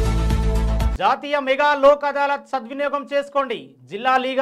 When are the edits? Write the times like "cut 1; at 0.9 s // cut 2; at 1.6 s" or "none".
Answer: cut 1; at 0.9 s